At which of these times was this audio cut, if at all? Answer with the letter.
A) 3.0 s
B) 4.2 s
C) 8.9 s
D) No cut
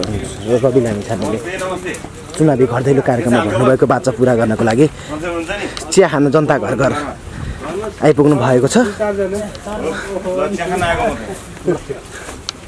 D